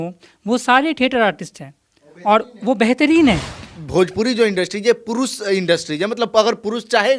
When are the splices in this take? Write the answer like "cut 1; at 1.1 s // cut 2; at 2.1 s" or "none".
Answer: cut 1; at 3.6 s